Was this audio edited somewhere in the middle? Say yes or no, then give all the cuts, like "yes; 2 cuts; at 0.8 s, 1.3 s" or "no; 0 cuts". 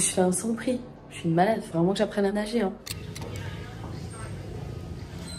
no; 0 cuts